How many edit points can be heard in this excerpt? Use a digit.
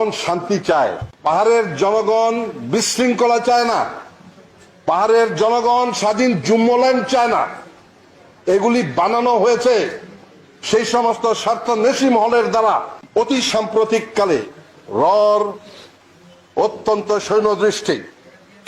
2